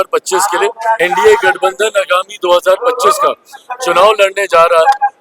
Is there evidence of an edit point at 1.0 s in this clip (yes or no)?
yes